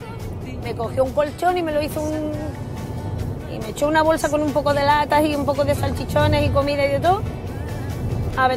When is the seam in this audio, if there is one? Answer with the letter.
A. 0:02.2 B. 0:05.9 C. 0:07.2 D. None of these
D